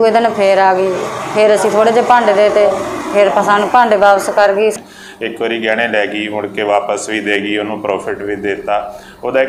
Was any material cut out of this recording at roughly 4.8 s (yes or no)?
yes